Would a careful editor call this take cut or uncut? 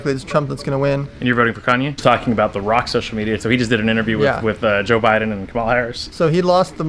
cut